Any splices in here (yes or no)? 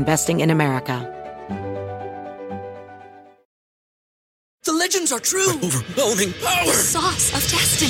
yes